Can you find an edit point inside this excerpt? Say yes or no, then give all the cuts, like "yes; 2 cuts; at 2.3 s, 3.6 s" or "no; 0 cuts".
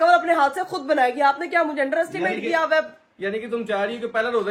no; 0 cuts